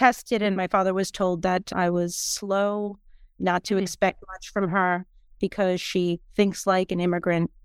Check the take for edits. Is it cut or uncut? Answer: uncut